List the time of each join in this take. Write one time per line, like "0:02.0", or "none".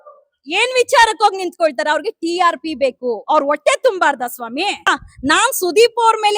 0:05.0